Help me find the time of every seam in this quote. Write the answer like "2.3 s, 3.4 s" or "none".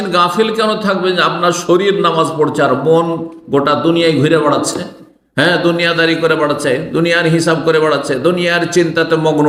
none